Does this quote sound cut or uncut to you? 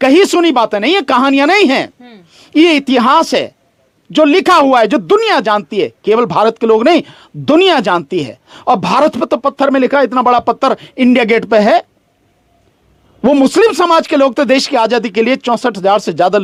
uncut